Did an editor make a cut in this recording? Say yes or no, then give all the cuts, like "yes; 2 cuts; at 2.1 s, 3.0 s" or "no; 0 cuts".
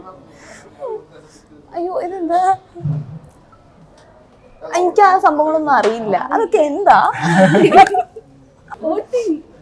yes; 1 cut; at 8.7 s